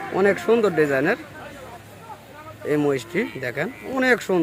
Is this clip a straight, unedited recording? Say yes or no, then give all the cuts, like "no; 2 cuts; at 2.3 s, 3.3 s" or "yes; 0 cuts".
yes; 0 cuts